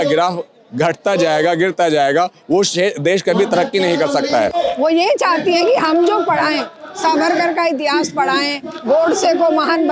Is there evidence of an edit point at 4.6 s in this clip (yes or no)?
yes